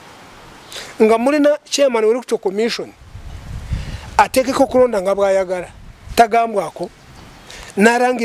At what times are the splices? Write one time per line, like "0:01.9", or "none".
none

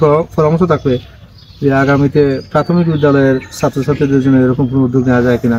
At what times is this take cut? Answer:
none

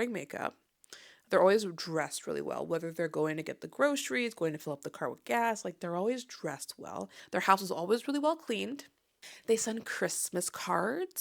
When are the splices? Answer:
0:07.2
0:09.3

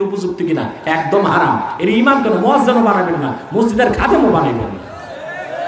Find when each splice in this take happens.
none

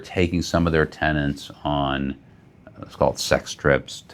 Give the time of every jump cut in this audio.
none

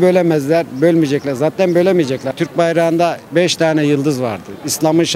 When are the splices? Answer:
0:02.3

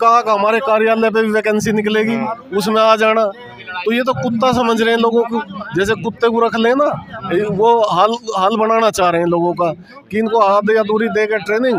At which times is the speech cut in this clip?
none

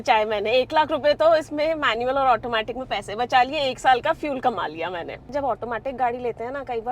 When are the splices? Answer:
0:05.3

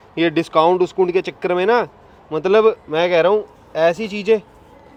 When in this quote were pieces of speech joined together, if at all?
none

